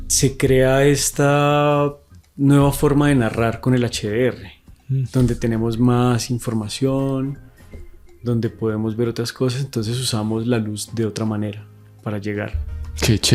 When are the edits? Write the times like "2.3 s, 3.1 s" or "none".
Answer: none